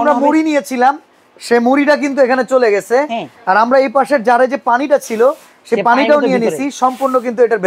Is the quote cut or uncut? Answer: uncut